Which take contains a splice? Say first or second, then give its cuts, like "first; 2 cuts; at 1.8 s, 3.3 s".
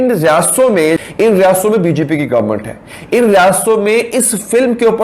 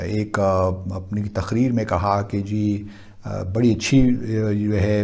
first; 1 cut; at 1.1 s